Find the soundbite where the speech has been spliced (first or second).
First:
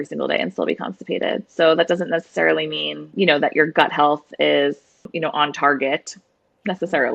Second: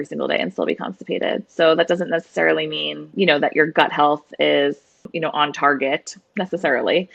second